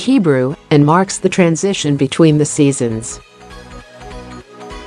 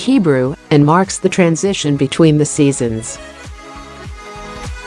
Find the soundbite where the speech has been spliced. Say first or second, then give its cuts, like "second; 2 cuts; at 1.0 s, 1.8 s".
first; 1 cut; at 3.1 s